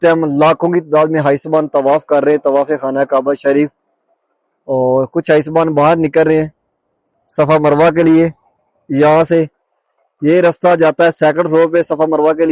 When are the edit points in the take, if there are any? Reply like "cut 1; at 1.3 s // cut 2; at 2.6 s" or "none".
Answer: none